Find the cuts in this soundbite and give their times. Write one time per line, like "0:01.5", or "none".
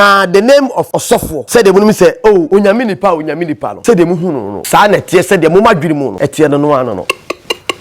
0:01.0
0:02.5
0:03.7
0:04.5
0:06.1
0:07.1